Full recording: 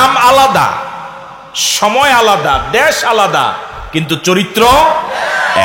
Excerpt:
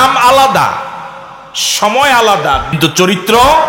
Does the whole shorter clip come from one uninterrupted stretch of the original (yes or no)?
no